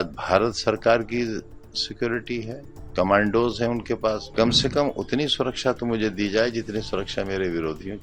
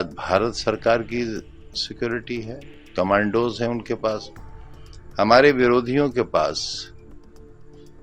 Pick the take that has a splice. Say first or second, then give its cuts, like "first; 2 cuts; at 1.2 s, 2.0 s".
first; 1 cut; at 4.3 s